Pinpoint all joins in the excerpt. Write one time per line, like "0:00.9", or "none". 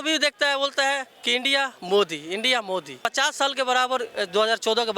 0:02.9